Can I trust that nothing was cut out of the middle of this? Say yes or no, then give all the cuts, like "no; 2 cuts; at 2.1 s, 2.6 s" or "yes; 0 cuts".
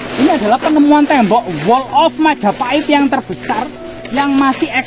yes; 0 cuts